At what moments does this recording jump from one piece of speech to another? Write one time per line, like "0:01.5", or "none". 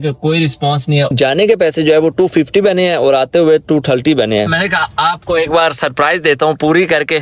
0:01.1
0:04.5